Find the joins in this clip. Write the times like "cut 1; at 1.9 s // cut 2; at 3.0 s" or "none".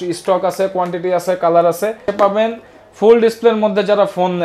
cut 1; at 2.1 s